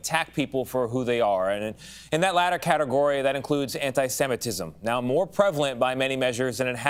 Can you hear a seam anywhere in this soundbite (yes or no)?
no